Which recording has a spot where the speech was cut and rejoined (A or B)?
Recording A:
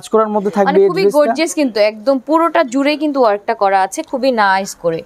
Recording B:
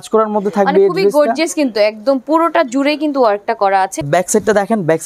B